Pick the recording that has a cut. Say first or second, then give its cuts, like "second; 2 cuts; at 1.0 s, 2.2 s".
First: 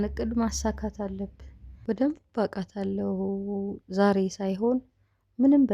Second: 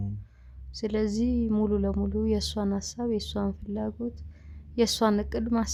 first; 1 cut; at 1.8 s